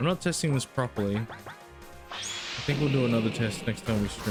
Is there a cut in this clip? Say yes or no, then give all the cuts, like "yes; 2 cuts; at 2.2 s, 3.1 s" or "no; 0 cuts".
no; 0 cuts